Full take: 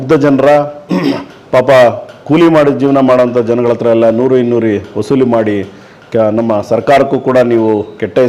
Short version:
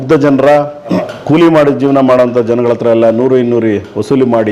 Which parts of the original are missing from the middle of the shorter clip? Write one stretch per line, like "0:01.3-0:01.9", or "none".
0:01.0-0:02.0